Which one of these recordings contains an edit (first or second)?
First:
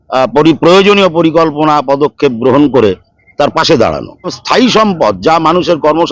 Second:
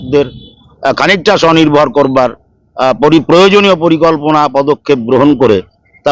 first